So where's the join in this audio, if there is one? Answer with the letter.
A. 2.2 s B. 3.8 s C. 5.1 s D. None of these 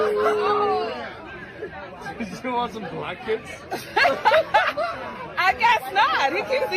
D